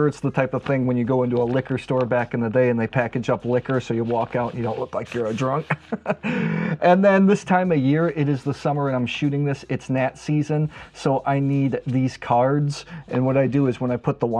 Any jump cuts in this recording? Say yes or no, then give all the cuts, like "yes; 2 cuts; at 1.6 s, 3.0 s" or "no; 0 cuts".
no; 0 cuts